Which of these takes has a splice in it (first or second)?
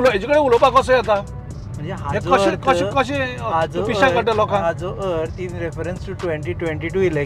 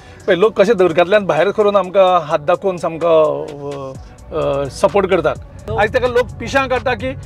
second